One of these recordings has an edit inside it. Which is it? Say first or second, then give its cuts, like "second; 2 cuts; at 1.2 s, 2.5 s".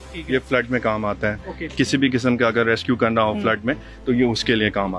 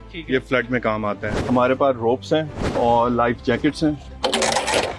second; 3 cuts; at 1.3 s, 2.7 s, 4.1 s